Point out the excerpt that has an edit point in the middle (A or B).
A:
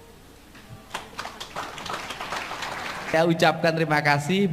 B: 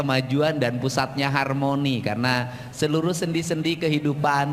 A